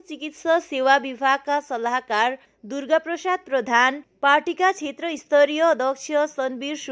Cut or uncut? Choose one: uncut